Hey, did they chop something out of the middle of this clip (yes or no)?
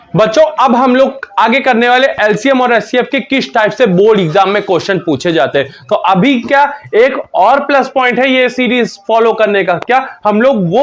no